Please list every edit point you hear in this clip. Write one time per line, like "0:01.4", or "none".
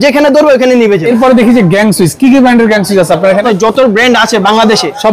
0:01.0
0:03.4